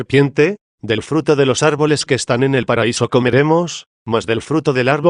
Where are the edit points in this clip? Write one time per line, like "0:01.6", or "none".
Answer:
none